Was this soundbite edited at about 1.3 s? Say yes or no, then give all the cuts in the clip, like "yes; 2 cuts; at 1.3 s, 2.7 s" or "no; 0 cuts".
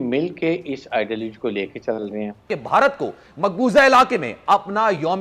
no; 1 cut; at 2.5 s